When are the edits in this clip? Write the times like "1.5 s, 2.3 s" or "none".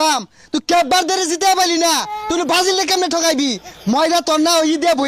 none